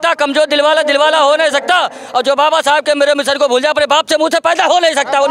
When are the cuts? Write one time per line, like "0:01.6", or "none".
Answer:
none